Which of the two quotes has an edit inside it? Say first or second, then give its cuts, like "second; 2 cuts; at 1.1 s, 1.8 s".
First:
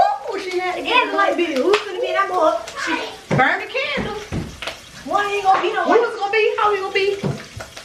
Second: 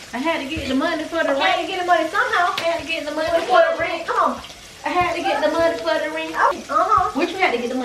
second; 1 cut; at 6.5 s